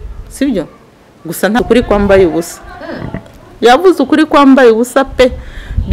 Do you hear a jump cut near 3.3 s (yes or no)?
no